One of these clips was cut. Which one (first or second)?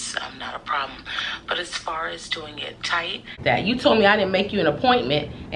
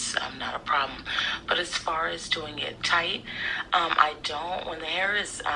first